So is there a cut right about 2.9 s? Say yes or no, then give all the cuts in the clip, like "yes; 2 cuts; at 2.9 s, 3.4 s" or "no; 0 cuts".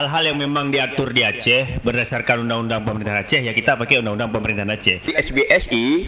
no; 1 cut; at 5.1 s